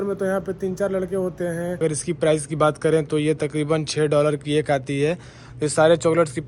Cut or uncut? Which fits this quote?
cut